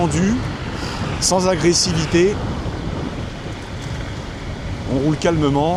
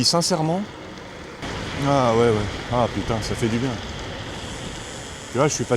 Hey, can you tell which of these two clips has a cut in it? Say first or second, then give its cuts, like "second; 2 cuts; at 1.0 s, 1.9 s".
second; 1 cut; at 1.4 s